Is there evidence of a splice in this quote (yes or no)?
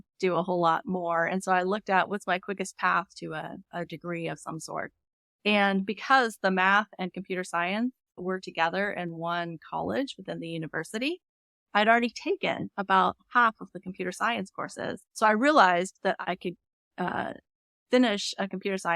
yes